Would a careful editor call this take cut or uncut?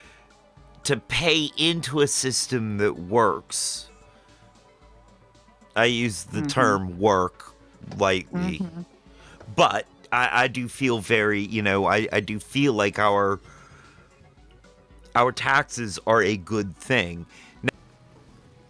cut